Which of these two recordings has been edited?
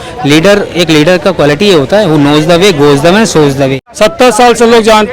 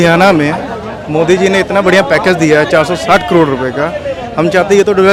first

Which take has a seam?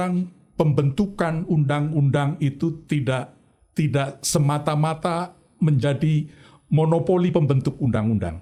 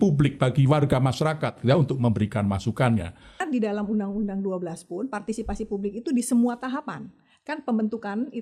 second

